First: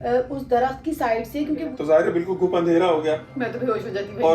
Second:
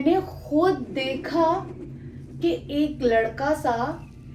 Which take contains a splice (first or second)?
first